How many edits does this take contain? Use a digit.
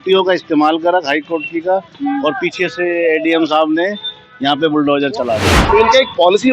1